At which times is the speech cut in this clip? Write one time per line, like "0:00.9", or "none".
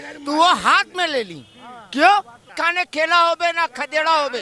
0:02.6